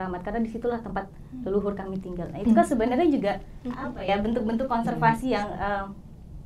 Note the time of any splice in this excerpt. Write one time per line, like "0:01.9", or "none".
none